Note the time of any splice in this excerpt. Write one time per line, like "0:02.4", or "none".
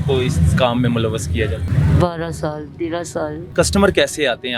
0:01.7
0:03.5